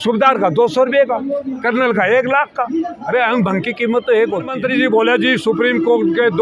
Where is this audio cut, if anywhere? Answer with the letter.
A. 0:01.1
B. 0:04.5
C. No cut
B